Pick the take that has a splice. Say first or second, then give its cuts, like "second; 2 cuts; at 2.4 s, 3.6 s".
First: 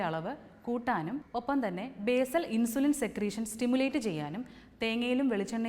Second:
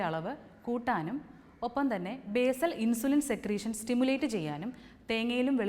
first; 1 cut; at 1.2 s